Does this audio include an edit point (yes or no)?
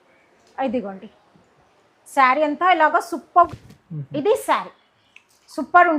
yes